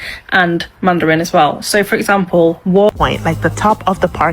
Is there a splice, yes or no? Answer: yes